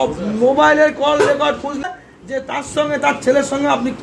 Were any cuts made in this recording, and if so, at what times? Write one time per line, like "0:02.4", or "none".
0:01.8